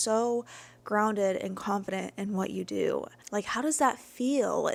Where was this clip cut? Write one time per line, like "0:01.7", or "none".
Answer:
none